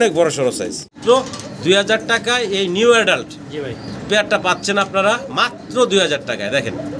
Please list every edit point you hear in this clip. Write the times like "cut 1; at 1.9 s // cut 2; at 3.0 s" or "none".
cut 1; at 0.9 s